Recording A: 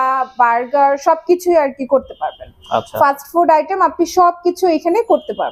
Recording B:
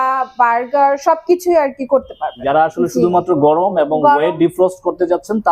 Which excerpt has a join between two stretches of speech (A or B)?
B